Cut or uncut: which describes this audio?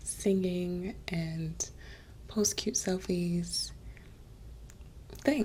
uncut